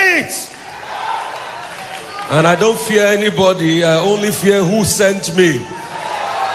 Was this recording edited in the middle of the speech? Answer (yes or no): no